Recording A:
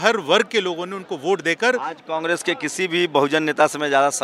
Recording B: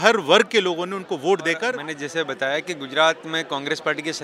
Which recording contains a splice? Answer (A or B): B